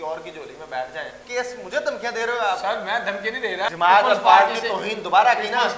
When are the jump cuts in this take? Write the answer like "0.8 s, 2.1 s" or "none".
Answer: 1.2 s, 3.7 s